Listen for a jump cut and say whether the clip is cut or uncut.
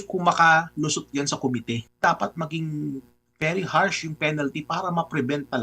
cut